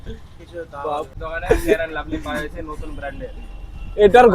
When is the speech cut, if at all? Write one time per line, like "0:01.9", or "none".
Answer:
0:01.2